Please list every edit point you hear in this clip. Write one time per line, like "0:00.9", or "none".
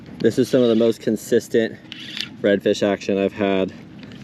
none